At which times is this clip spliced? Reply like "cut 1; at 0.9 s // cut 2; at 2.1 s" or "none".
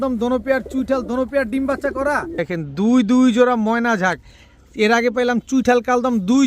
cut 1; at 2.4 s